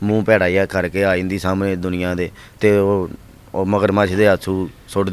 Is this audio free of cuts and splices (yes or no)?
yes